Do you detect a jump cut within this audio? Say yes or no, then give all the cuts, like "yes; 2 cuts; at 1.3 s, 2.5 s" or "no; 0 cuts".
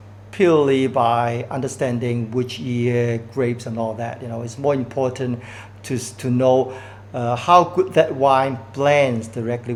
no; 0 cuts